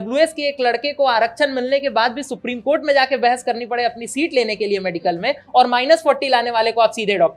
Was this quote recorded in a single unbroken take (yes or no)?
yes